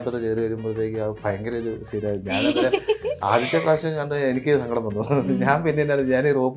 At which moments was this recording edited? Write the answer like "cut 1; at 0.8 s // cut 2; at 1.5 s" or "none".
none